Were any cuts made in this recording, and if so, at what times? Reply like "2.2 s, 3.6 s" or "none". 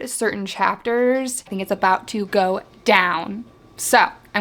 1.5 s